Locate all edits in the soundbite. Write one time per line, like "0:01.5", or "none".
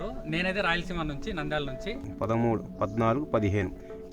0:02.1